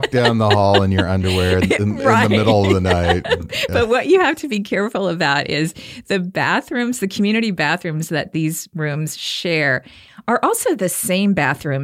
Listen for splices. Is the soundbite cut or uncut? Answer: uncut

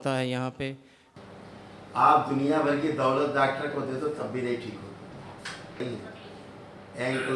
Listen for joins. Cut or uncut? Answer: cut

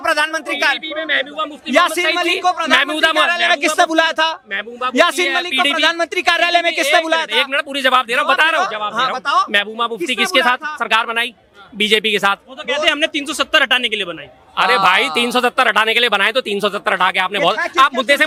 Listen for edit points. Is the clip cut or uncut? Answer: uncut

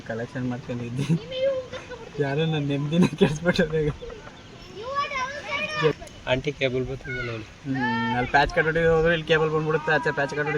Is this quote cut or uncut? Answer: cut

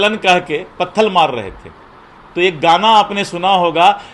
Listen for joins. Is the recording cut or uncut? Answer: uncut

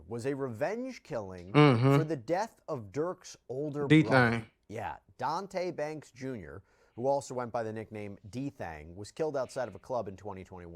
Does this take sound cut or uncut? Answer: uncut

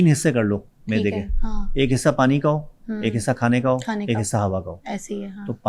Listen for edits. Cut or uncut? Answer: uncut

